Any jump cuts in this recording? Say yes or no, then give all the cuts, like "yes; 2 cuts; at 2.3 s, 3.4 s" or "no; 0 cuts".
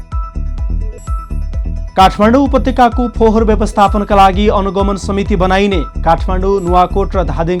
yes; 1 cut; at 1.8 s